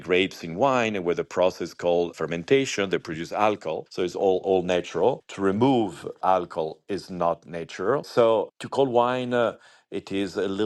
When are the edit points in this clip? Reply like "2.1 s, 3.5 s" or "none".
none